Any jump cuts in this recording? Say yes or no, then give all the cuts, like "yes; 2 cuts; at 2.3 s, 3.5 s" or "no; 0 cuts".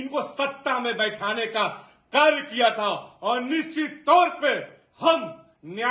no; 0 cuts